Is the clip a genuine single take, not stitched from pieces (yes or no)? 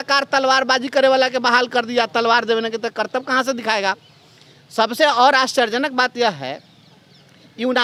yes